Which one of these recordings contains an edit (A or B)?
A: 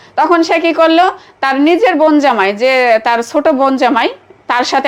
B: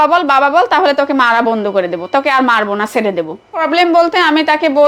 B